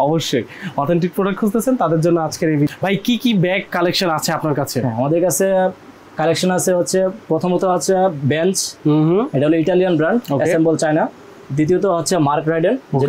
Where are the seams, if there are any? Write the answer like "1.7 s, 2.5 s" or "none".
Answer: 2.7 s